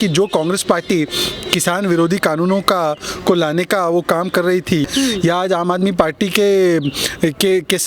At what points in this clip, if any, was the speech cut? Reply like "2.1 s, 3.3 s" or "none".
4.9 s